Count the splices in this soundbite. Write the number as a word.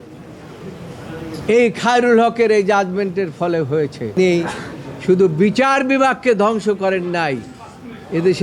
one